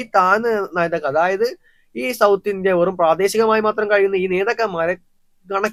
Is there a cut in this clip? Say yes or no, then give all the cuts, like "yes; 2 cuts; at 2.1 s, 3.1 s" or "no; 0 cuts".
no; 0 cuts